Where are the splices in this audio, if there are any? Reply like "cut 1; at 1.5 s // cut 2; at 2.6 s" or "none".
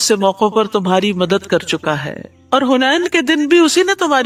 none